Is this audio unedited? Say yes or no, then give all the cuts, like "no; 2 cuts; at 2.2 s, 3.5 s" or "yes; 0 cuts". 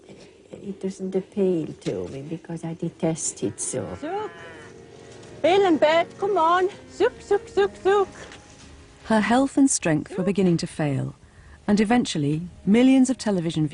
no; 1 cut; at 5.8 s